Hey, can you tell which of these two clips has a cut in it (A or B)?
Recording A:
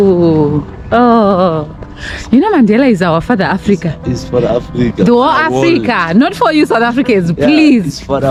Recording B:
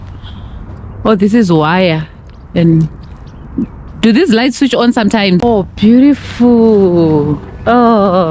B